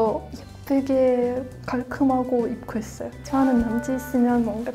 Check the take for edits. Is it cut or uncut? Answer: cut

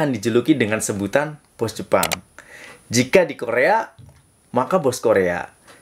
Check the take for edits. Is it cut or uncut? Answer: uncut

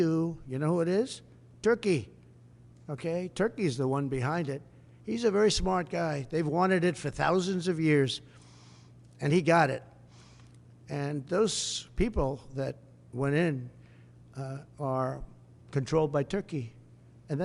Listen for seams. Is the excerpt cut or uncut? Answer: uncut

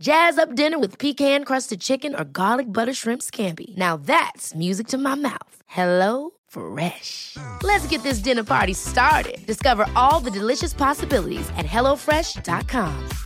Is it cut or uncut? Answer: uncut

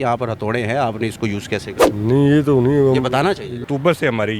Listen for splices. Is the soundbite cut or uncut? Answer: cut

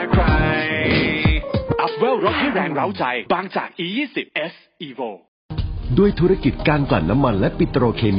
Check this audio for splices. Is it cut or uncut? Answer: cut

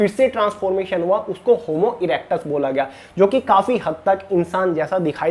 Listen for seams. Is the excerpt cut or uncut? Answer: uncut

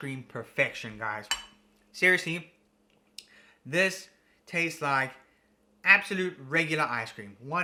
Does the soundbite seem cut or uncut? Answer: uncut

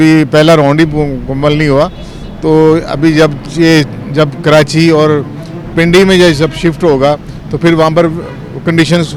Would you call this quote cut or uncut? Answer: uncut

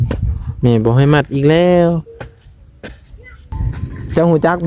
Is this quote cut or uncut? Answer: cut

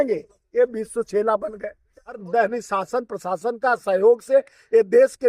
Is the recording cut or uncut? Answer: cut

